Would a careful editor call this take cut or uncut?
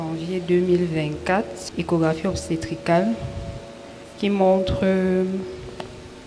cut